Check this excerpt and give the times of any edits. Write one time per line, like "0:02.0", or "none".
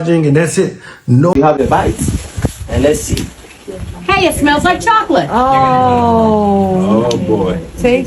0:01.3